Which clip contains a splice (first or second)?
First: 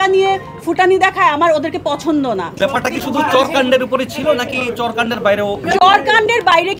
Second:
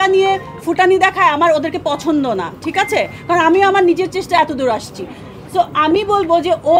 first